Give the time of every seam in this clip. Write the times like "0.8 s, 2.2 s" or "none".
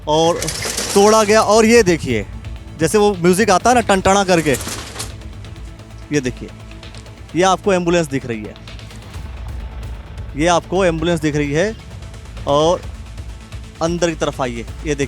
none